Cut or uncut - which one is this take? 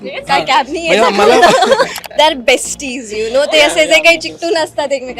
cut